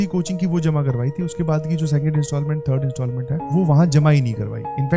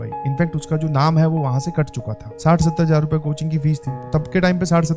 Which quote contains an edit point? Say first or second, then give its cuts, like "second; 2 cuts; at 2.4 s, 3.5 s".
second; 2 cuts; at 2.2 s, 4.0 s